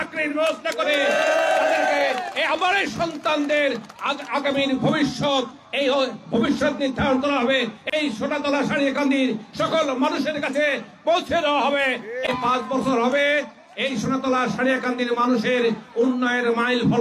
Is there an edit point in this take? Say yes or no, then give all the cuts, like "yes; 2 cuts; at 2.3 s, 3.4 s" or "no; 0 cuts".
no; 0 cuts